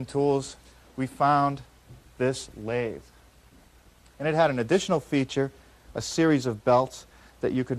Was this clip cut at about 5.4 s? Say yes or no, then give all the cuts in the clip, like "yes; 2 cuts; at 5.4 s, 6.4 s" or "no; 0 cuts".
no; 0 cuts